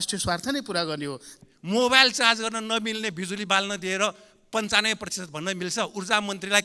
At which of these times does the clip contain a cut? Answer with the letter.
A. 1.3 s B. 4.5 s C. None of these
A